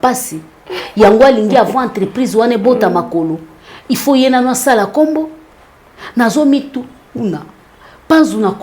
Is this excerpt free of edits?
yes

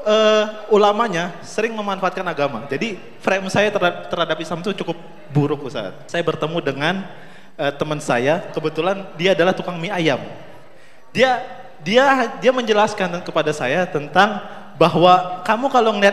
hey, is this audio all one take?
no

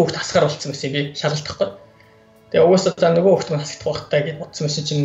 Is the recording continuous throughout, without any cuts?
yes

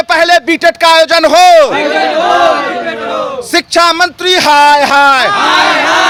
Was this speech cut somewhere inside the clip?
no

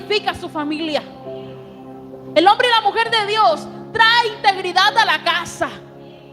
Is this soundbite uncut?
yes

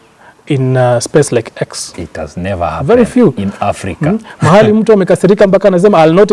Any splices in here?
no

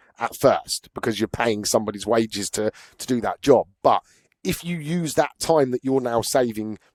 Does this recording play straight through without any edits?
yes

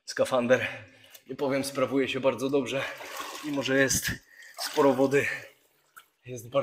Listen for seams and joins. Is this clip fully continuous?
yes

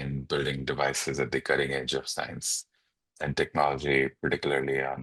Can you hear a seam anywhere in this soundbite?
no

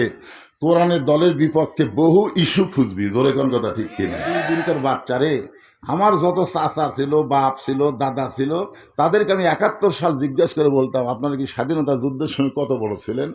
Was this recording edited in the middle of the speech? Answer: yes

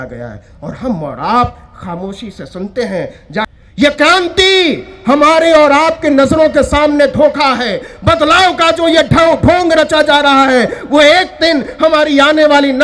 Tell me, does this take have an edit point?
yes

